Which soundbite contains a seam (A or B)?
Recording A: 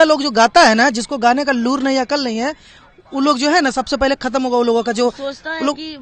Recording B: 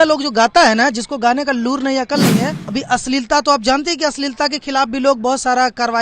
B